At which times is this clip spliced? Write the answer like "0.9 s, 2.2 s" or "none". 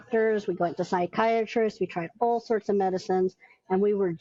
none